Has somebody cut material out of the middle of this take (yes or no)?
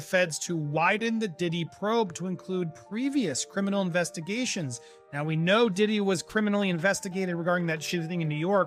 no